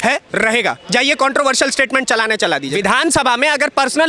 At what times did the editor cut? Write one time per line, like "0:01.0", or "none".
0:02.7

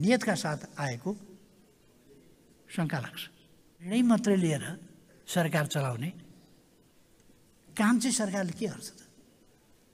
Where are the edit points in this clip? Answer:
0:03.9

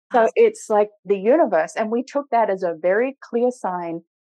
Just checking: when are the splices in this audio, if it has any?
0:01.0

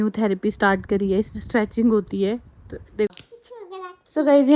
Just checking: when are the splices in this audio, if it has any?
0:03.1

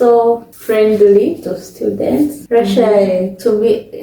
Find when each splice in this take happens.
0:02.4

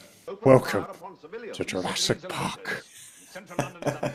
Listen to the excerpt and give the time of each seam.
none

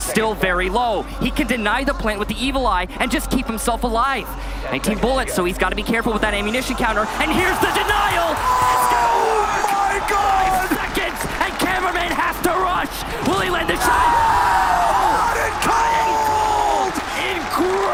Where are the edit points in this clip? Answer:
none

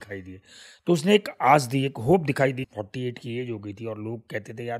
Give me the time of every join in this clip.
0:02.6

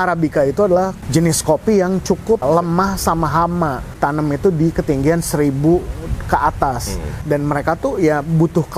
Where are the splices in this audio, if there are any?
0:01.0
0:02.4
0:04.0
0:07.2

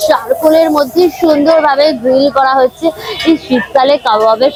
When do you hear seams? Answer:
none

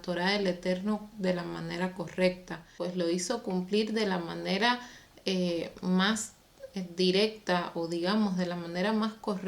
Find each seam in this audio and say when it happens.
0:02.8

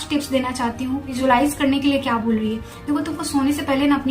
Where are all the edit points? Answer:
0:01.2

